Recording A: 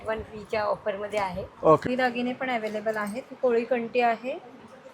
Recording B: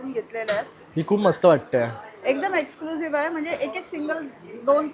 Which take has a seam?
A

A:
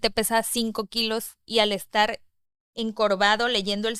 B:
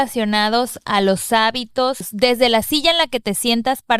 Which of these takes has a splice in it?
B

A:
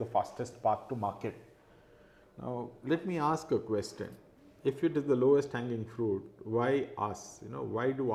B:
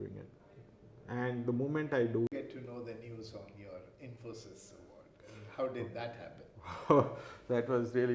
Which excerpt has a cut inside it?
B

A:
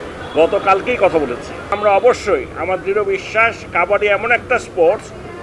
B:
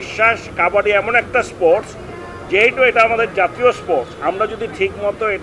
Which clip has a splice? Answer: A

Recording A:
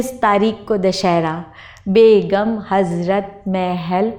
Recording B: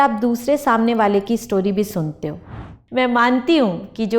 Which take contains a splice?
B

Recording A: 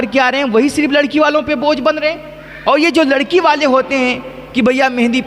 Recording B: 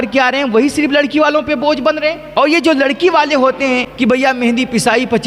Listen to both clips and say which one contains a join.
B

